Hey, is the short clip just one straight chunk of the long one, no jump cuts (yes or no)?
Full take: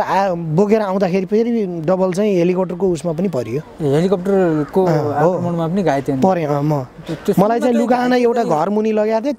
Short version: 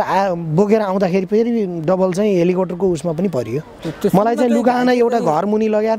no